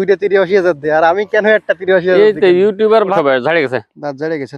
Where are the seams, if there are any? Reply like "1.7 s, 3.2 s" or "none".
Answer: 3.1 s